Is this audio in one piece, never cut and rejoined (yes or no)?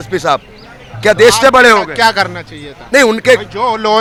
yes